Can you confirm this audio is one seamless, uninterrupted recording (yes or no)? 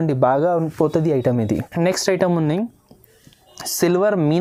yes